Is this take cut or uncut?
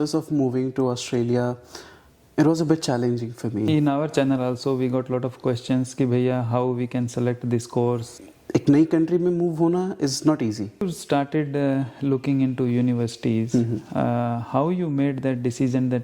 cut